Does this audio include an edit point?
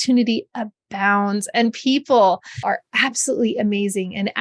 yes; 1 cut; at 2.6 s

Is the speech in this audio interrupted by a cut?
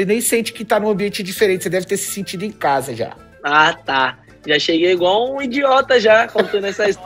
no; 0 cuts

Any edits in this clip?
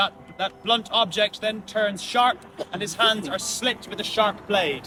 no; 0 cuts

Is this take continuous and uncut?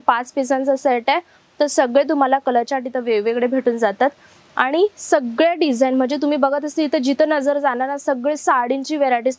yes; 0 cuts

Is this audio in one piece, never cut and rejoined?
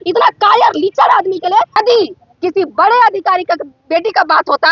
no; 1 cut; at 1.8 s

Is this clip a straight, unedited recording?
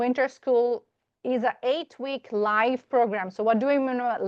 yes; 0 cuts

